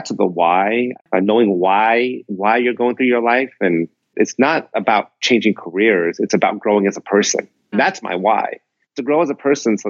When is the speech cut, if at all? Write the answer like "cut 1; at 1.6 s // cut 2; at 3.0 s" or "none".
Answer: cut 1; at 1.0 s // cut 2; at 4.2 s // cut 3; at 7.7 s